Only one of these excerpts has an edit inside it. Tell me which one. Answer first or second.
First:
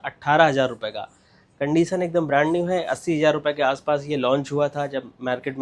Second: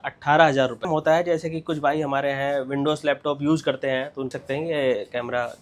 second